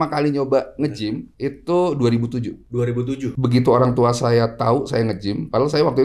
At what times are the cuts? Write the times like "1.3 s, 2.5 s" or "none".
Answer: 3.3 s